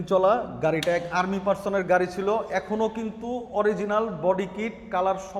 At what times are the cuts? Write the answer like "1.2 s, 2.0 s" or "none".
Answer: none